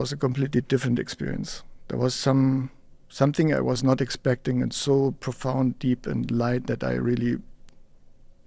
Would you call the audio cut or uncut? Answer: uncut